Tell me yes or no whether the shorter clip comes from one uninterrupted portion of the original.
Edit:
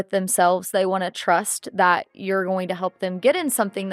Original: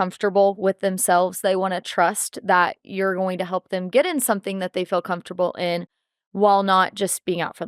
yes